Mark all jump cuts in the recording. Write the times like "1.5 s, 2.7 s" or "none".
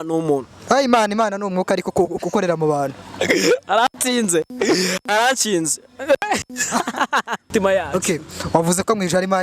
7.5 s